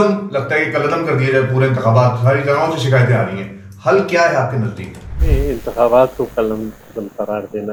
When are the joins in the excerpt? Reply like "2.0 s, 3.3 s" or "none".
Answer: none